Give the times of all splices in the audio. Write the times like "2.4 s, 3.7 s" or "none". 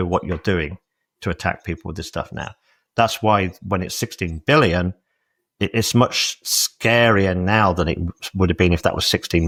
none